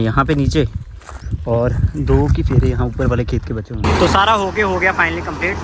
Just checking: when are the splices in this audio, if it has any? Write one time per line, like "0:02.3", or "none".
0:03.7